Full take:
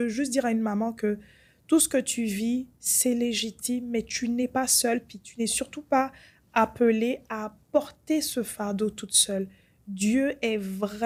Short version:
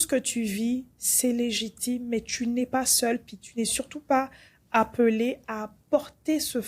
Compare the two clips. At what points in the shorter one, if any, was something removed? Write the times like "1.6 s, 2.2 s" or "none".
none